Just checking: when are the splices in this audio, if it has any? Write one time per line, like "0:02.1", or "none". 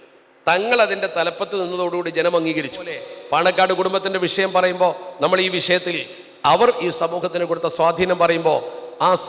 0:03.1